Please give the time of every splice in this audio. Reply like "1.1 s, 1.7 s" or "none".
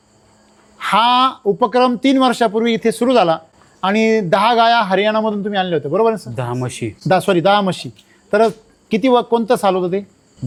none